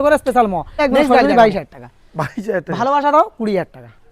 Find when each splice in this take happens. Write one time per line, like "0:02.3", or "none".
0:01.3